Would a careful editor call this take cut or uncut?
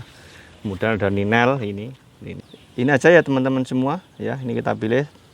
cut